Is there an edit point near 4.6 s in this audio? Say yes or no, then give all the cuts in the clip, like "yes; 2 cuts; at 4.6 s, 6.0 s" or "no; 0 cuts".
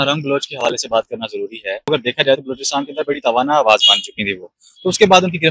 no; 1 cut; at 1.9 s